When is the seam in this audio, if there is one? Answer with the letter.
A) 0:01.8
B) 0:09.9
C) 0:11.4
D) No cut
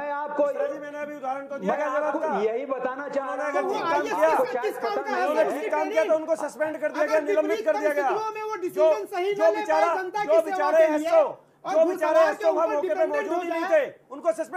D